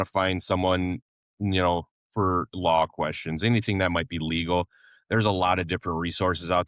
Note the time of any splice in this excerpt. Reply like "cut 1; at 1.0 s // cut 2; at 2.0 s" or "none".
none